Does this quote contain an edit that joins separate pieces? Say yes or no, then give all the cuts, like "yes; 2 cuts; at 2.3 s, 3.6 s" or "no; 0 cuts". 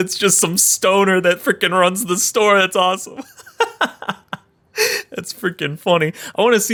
no; 0 cuts